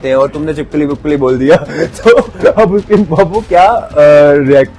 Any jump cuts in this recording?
no; 0 cuts

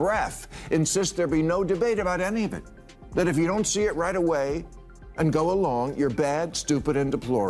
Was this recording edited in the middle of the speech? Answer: yes; 1 cut; at 2.7 s

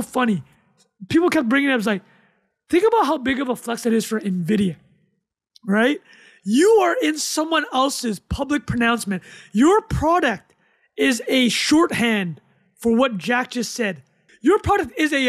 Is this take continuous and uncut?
no; 1 cut; at 14.2 s

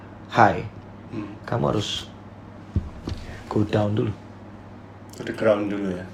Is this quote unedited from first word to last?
yes; 0 cuts

